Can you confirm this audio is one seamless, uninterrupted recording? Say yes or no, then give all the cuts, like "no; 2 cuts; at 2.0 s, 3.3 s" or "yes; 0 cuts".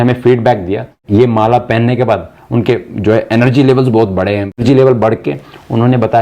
no; 2 cuts; at 1.0 s, 4.6 s